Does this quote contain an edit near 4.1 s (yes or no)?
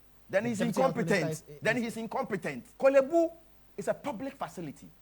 no